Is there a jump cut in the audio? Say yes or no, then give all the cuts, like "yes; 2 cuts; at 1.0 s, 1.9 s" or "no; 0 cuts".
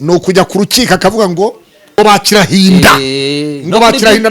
yes; 1 cut; at 2.0 s